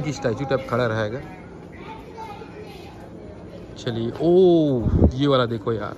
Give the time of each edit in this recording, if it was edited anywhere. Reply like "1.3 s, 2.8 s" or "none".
none

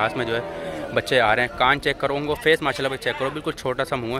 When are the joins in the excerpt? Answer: none

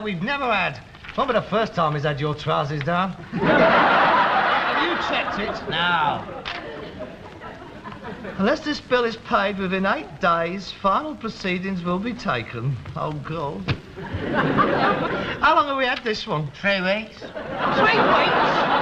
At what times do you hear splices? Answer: 9.2 s

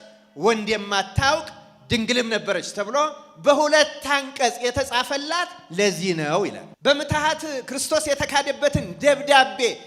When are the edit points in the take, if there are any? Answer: 6.7 s

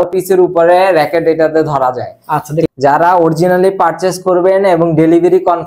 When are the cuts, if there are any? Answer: 2.7 s

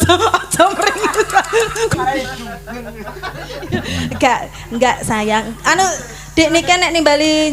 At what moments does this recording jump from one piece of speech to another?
1.9 s

